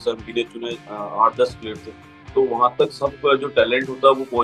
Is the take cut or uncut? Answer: cut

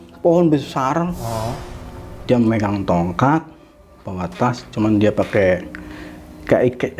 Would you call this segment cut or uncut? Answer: uncut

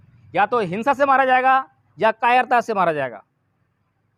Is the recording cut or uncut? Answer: uncut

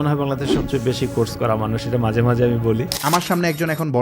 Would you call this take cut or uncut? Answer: cut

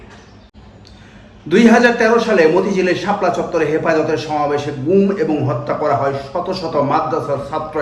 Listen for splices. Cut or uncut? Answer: uncut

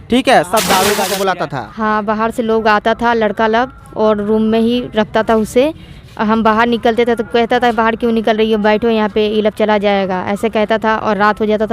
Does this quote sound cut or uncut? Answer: cut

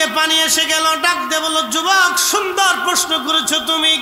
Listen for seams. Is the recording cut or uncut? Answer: uncut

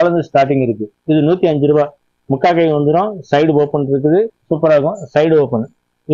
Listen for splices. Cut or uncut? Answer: cut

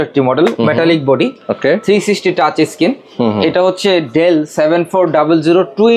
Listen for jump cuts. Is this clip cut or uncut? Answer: uncut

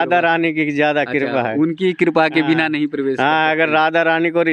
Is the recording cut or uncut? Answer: uncut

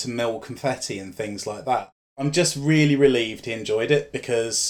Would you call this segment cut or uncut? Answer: cut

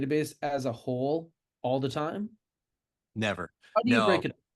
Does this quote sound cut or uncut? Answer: uncut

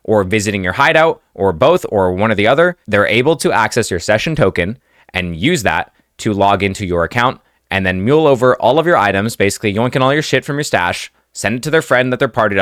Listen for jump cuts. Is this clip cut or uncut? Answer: uncut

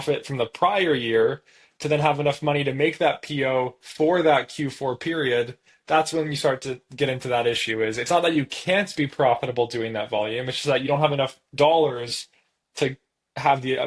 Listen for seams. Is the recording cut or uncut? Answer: uncut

